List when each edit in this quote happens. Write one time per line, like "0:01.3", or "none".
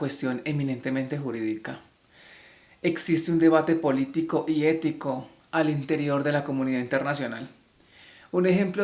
none